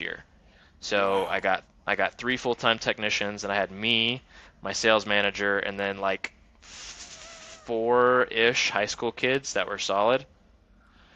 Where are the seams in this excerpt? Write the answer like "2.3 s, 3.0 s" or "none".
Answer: none